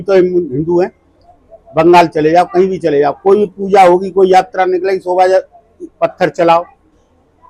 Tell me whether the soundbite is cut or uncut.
uncut